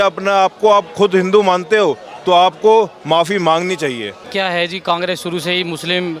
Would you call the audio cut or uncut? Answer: cut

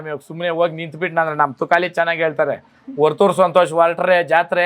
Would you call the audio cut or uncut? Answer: uncut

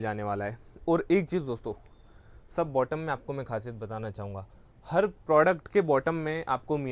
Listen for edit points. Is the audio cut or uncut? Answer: uncut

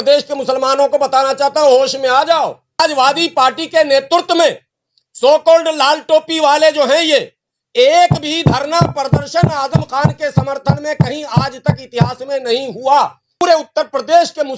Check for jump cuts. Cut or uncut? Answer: cut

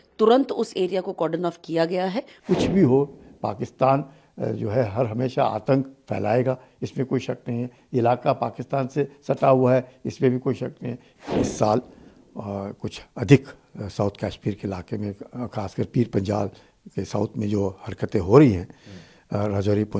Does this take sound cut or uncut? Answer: cut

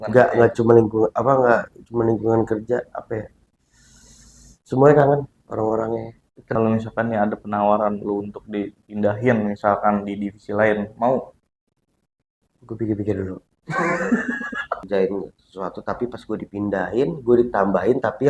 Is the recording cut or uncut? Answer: cut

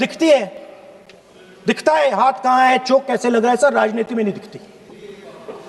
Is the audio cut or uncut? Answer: uncut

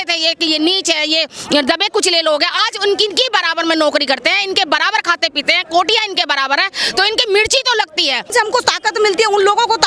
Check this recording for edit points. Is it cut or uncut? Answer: cut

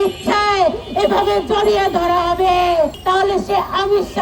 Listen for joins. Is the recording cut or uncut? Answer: cut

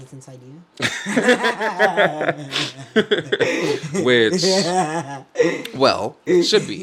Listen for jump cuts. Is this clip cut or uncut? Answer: uncut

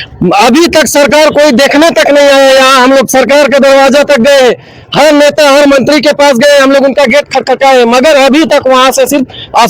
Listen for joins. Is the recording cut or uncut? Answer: uncut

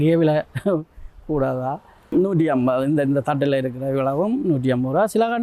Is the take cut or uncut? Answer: cut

